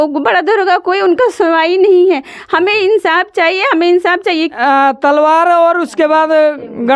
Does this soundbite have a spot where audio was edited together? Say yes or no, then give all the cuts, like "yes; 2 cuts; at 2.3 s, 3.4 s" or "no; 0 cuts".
yes; 1 cut; at 4.5 s